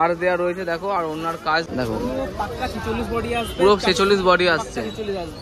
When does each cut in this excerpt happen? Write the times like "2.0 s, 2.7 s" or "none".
1.7 s